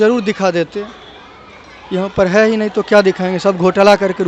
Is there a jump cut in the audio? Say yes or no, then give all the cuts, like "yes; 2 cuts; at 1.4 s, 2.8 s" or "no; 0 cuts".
no; 0 cuts